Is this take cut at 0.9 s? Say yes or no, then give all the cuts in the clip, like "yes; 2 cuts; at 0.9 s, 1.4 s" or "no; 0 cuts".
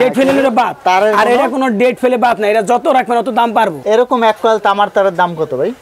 no; 1 cut; at 3.8 s